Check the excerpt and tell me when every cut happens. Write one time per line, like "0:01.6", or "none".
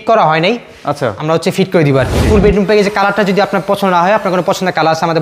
0:02.3